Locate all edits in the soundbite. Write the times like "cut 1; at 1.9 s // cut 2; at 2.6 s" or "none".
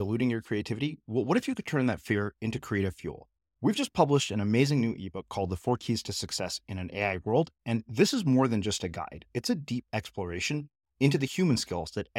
none